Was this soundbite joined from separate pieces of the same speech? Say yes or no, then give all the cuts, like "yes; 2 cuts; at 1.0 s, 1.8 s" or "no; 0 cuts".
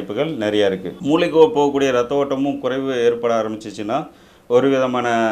yes; 1 cut; at 0.9 s